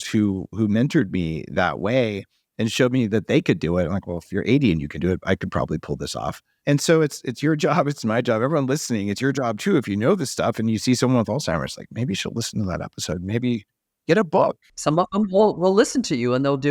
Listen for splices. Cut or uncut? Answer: cut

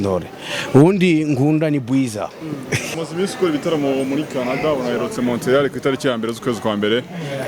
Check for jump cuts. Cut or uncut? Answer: cut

